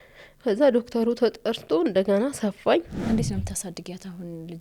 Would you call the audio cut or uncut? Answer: cut